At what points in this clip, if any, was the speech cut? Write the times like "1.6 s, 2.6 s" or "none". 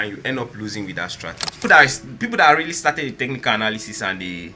1.6 s